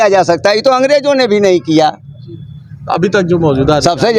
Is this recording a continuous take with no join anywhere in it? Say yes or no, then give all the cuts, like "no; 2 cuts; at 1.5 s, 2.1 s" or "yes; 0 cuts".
yes; 0 cuts